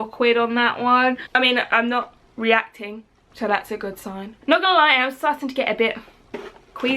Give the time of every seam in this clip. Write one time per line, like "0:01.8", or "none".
0:01.2
0:04.4